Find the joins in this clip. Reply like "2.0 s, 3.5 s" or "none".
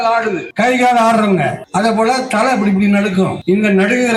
none

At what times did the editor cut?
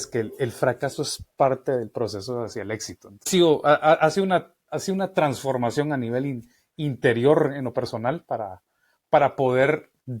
3.3 s

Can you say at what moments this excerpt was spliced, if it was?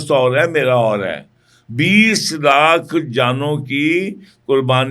none

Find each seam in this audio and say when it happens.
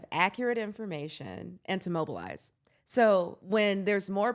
3.4 s

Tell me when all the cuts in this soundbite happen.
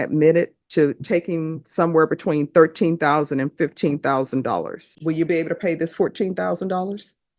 4.9 s

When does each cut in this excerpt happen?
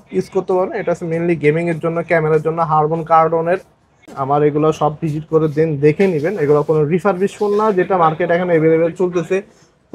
4.1 s

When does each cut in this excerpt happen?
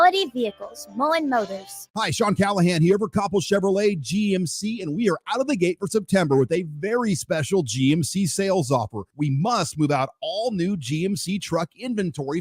1.9 s

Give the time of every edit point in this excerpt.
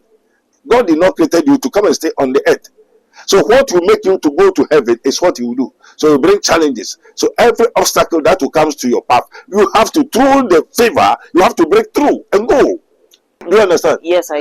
13.4 s

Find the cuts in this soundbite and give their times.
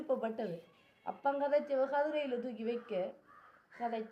none

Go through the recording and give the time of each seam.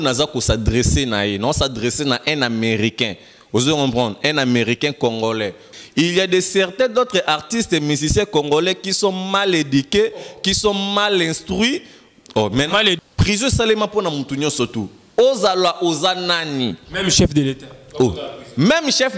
5.7 s, 13.0 s

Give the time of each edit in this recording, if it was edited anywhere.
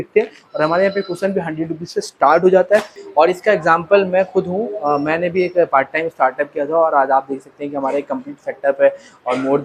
3.0 s

